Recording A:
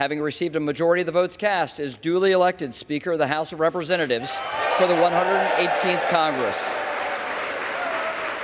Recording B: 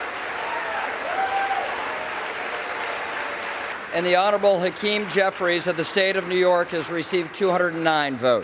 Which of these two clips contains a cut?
B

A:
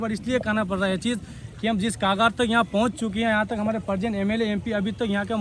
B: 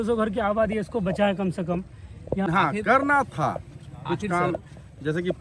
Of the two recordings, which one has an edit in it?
B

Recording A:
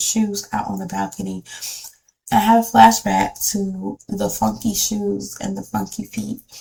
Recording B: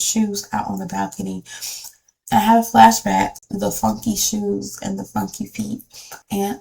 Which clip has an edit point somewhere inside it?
B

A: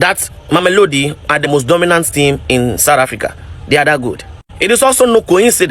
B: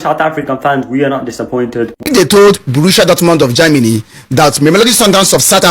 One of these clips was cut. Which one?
B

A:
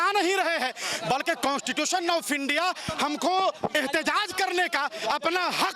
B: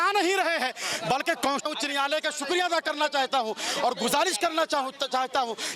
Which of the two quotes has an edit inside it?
B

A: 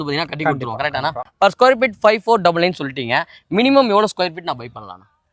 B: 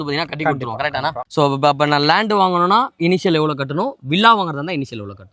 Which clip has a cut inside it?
B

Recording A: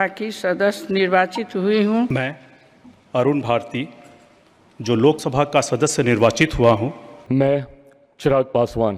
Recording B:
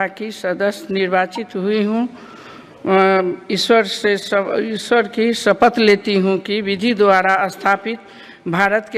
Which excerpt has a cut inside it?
A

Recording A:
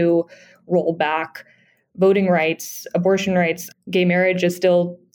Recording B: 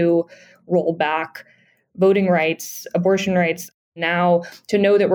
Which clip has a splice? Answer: B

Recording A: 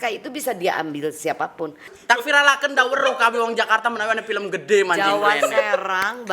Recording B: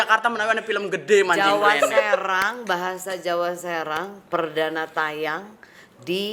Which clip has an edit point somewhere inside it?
A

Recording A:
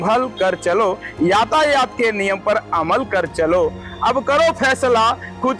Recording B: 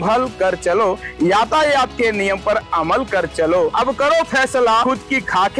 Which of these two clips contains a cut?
B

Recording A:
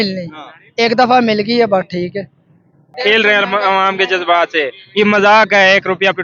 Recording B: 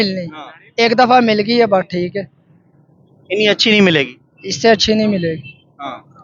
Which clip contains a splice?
A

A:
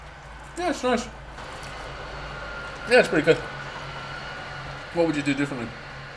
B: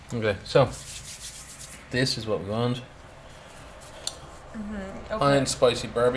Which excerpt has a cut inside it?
A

